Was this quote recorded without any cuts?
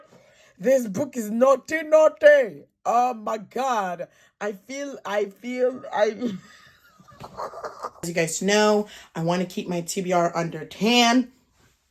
no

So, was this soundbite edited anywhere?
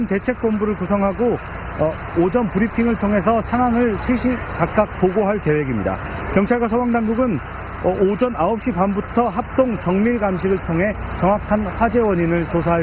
yes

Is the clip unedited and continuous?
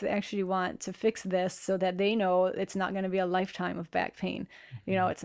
yes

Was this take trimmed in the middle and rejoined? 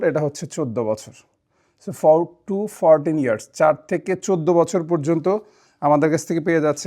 no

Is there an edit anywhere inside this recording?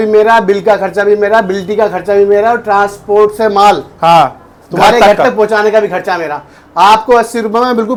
no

